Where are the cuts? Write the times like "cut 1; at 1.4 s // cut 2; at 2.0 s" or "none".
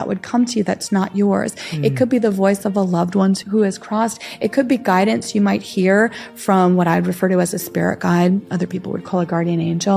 cut 1; at 3.4 s